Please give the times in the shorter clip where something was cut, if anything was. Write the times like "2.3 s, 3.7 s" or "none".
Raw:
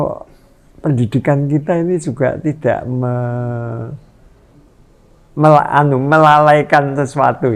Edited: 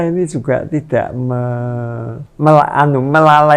2.2 s